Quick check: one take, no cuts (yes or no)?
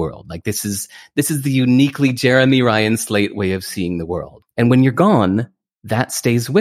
no